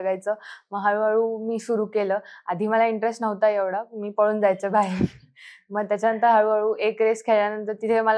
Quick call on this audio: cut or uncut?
uncut